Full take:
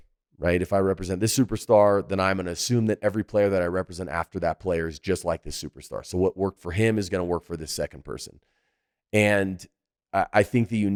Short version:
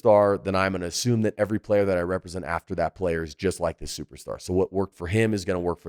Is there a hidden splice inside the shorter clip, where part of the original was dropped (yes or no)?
no